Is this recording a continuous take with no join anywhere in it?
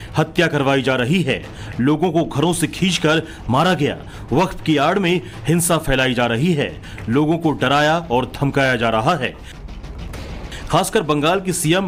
yes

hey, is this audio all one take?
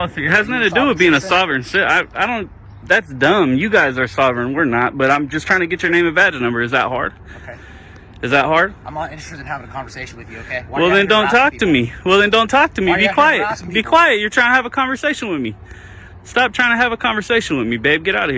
yes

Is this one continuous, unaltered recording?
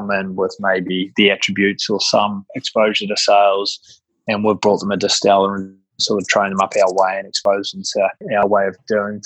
no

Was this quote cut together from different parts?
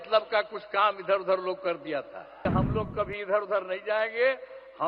yes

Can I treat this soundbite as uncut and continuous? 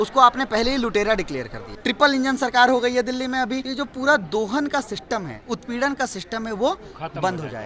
no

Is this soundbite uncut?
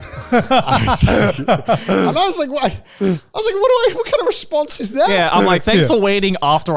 yes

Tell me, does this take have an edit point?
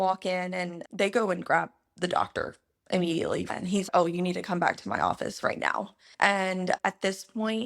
yes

